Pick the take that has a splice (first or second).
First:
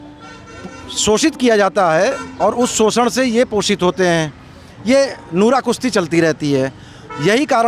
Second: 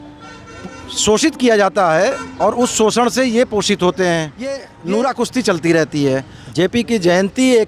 second